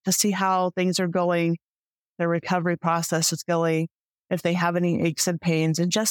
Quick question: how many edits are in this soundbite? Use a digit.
1